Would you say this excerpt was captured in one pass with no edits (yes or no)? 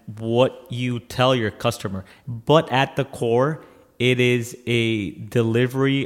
no